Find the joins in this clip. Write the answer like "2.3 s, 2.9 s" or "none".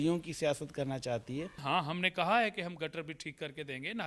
1.6 s